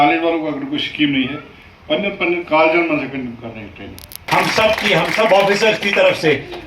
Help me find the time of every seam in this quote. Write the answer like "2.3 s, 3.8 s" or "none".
4.2 s